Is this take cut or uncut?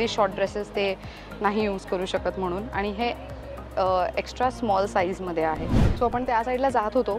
cut